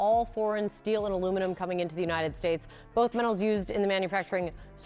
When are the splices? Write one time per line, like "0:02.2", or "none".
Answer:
none